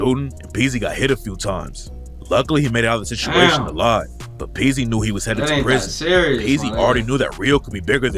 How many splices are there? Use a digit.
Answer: 0